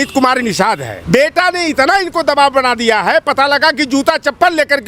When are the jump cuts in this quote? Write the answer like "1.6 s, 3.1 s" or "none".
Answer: 0.9 s